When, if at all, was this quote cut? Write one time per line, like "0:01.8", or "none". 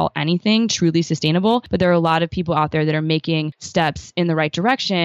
0:01.7
0:03.6